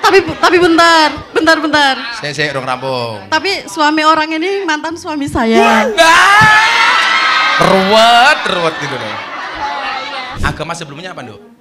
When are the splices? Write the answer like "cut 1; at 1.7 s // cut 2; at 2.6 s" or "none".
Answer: cut 1; at 10.4 s